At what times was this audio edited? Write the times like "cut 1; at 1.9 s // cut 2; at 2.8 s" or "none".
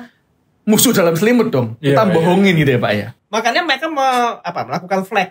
cut 1; at 3.1 s